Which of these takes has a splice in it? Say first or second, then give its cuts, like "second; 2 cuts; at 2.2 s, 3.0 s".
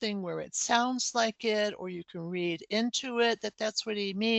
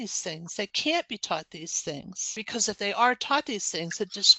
second; 1 cut; at 2.4 s